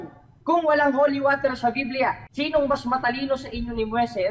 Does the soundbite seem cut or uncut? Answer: cut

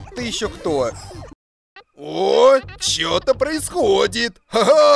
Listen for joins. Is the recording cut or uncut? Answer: cut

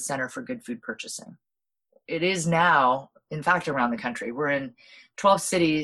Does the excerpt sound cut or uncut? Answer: cut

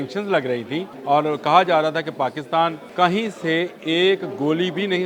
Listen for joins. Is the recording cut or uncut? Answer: cut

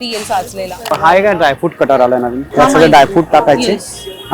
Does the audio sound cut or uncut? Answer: cut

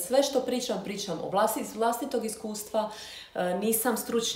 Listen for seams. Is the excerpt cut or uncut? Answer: uncut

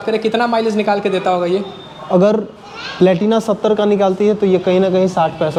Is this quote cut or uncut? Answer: uncut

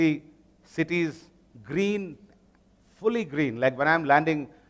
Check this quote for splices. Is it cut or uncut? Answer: uncut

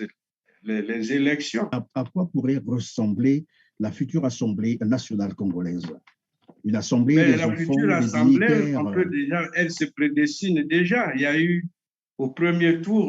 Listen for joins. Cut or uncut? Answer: cut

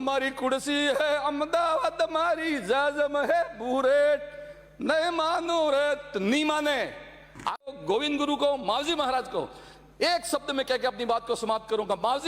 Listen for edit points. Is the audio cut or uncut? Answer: cut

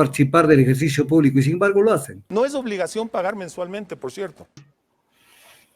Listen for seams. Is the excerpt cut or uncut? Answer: cut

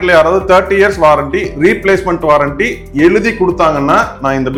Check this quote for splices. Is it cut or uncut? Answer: uncut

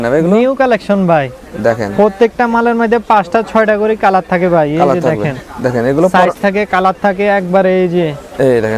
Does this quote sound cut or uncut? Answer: uncut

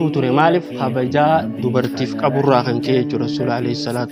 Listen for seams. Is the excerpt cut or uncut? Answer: uncut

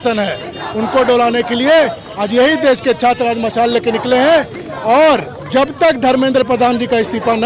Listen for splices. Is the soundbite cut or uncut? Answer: uncut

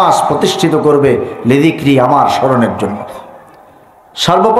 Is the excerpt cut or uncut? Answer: uncut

